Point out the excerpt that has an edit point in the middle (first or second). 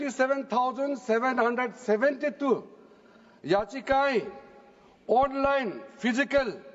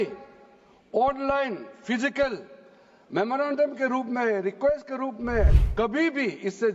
second